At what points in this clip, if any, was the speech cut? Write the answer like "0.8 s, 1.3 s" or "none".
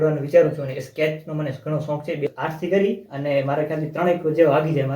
2.3 s